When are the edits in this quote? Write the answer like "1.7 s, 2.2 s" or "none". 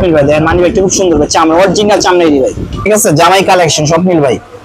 2.7 s